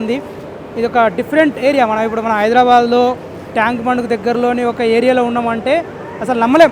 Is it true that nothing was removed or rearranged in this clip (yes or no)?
yes